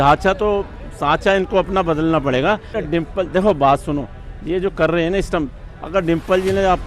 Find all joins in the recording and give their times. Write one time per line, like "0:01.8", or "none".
0:02.7

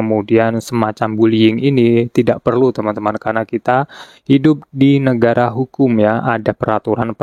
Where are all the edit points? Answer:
none

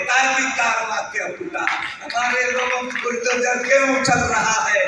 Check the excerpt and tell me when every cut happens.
none

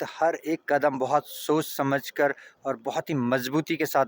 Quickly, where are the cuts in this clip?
none

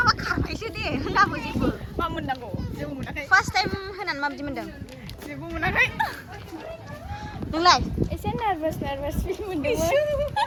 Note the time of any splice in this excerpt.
none

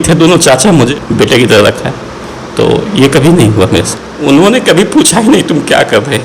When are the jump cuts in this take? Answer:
0:00.9
0:04.0

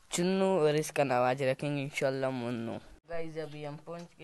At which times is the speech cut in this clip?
0:02.9

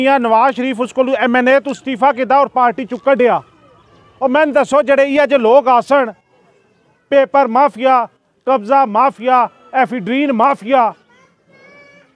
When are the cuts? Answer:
none

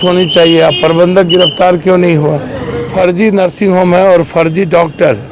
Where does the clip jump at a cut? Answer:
0:02.9

